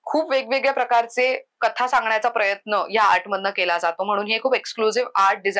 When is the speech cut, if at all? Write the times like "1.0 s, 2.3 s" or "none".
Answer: none